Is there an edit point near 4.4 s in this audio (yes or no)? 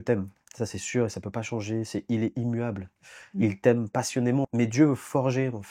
yes